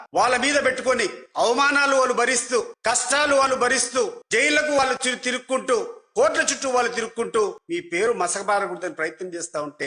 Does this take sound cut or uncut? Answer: uncut